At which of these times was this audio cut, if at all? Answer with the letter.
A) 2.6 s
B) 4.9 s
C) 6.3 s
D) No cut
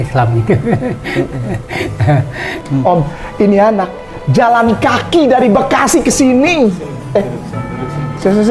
A